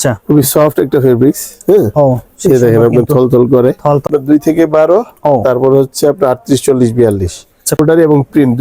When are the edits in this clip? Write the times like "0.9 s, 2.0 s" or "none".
4.1 s, 7.8 s